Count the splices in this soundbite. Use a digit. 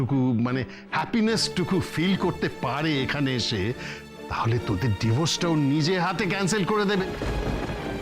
1